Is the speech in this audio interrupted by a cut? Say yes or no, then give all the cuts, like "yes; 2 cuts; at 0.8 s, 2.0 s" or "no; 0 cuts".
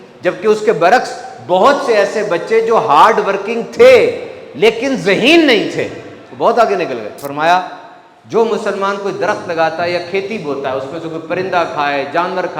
yes; 1 cut; at 7.2 s